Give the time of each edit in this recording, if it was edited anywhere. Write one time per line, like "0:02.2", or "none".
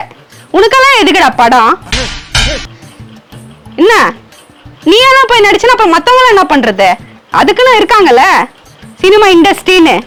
none